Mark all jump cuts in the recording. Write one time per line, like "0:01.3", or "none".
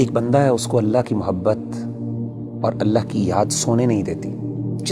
none